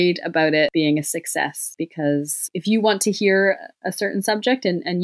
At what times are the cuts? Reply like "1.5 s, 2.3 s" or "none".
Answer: 0.7 s, 1.6 s, 2.5 s